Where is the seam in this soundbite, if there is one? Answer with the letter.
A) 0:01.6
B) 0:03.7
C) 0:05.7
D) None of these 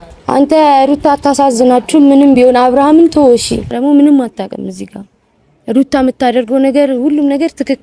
B